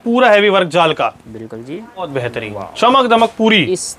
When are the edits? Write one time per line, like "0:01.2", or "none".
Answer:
0:02.1